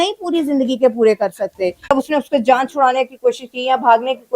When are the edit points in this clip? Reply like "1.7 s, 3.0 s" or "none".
1.9 s